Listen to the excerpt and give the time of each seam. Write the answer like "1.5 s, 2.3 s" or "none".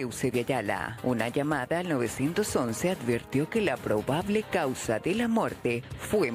none